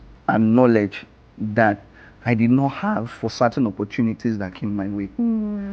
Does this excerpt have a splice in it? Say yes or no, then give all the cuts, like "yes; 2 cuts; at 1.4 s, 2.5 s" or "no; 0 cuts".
no; 0 cuts